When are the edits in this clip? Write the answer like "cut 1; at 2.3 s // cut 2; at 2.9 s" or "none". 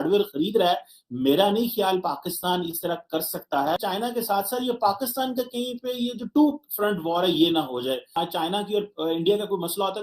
cut 1; at 3.8 s // cut 2; at 8.1 s